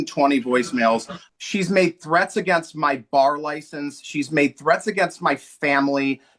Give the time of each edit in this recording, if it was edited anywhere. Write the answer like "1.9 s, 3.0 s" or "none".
1.2 s